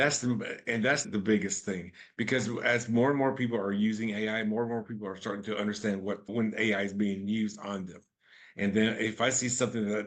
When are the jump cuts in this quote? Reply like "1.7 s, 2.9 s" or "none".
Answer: none

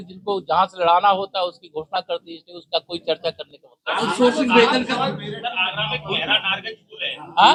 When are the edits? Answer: none

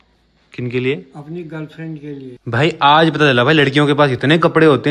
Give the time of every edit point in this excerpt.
2.3 s

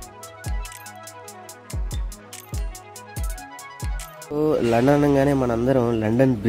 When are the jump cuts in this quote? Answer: 4.2 s

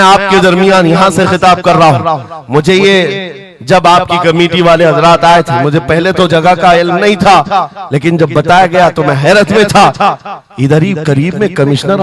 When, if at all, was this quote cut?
none

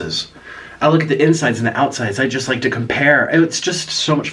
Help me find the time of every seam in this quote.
none

